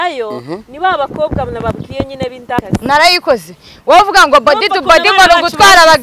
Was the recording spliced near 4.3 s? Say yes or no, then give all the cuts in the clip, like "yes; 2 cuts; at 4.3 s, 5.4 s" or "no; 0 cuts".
no; 1 cut; at 2.6 s